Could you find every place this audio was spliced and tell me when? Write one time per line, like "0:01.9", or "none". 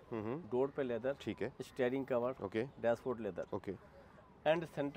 none